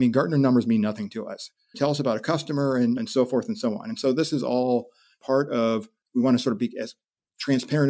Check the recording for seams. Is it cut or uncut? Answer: cut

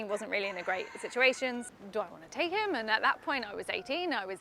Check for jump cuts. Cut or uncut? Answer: cut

